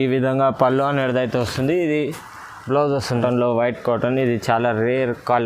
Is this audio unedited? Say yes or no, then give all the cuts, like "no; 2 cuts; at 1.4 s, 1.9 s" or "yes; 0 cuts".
no; 1 cut; at 3.2 s